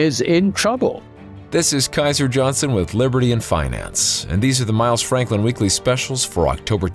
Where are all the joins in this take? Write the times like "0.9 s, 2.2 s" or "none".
1.0 s